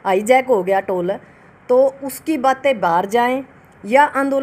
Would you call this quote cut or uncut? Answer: uncut